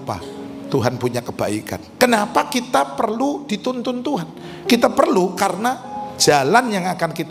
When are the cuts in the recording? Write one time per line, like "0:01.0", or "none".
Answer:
0:01.9